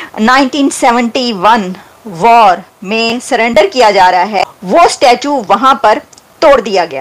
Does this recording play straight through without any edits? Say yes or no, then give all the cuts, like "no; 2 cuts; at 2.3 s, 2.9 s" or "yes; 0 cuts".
no; 1 cut; at 4.3 s